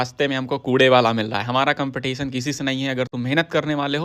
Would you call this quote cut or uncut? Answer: uncut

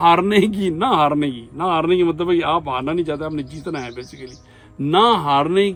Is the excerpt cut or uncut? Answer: uncut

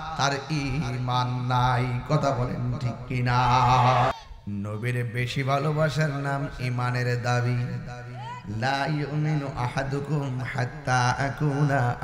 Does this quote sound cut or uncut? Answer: cut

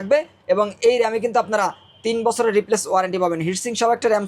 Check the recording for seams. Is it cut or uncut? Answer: uncut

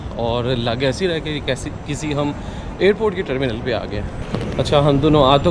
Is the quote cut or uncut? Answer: uncut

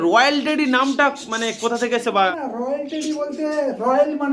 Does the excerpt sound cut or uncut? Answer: cut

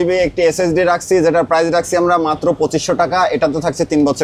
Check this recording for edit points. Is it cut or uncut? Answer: uncut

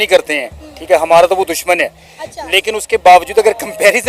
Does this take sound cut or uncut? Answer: uncut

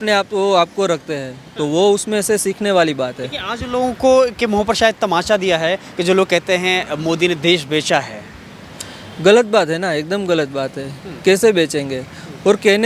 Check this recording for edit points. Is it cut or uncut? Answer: uncut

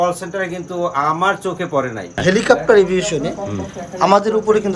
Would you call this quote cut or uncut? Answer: cut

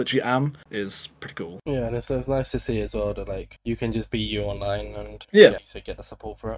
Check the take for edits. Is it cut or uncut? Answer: uncut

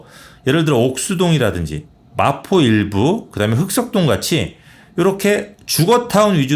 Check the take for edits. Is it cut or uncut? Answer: uncut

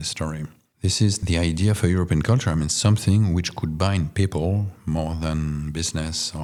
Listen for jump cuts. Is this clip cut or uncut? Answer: uncut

